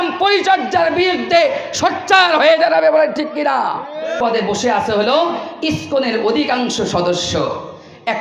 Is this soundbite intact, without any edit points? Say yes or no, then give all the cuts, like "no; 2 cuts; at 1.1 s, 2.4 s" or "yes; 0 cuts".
no; 1 cut; at 4.2 s